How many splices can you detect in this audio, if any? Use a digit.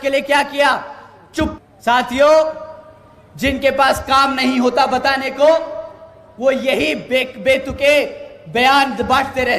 1